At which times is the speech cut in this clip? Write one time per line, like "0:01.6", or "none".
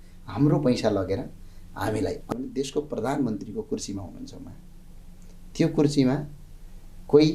0:02.2